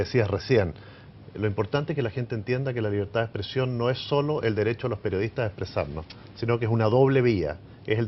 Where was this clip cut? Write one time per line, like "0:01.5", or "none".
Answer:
none

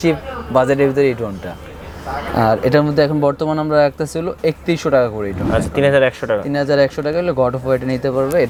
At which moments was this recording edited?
none

